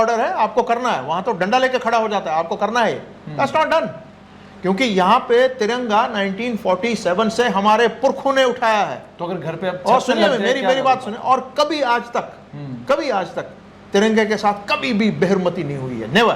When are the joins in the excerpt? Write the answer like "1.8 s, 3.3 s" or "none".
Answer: none